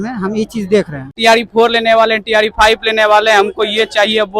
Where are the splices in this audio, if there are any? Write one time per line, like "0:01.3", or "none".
0:01.2

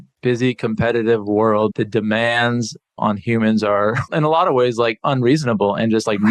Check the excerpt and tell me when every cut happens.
0:01.7
0:02.9
0:04.0

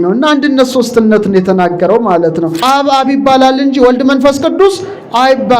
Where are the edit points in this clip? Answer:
0:02.6

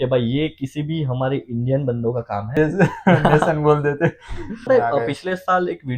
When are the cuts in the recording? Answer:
0:02.5
0:04.7

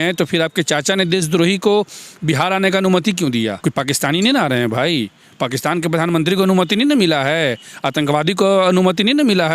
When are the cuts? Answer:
none

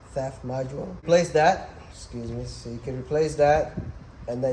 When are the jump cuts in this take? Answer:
0:01.0

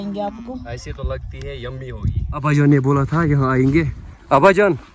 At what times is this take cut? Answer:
0:02.3

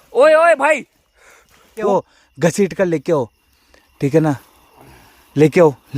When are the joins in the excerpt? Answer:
0:01.9

